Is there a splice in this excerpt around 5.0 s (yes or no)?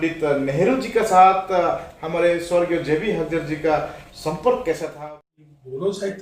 yes